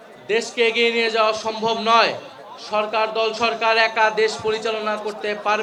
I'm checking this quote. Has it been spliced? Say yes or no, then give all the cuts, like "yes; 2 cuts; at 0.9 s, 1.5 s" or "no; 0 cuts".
no; 0 cuts